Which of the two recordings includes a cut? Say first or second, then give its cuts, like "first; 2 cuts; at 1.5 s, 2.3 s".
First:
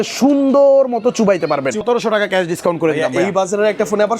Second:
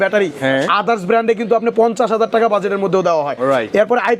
first; 1 cut; at 1.8 s